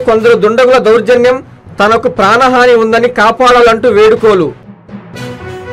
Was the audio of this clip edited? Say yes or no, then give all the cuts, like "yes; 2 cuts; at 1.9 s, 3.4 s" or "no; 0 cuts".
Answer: yes; 1 cut; at 4.6 s